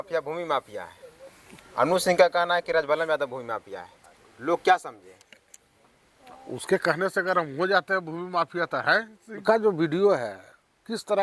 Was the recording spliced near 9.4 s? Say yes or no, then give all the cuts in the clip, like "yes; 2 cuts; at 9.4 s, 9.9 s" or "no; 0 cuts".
yes; 1 cut; at 9.4 s